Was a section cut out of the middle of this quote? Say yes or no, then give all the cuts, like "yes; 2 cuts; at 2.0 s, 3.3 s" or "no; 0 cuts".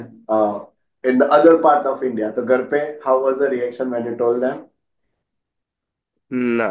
no; 0 cuts